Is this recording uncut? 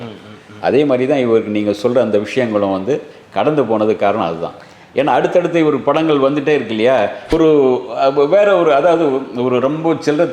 no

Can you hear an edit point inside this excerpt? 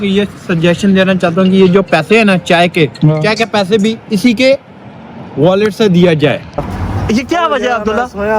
yes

